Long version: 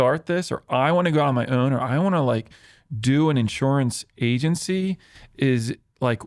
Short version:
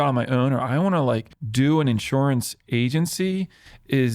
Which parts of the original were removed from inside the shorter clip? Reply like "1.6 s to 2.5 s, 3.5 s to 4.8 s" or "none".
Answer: 2.6 s to 2.9 s